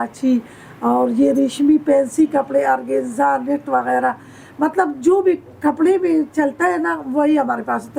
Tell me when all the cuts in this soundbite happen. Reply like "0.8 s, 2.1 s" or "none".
none